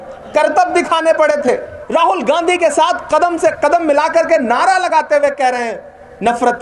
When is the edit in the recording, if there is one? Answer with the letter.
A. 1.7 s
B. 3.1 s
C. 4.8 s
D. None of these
A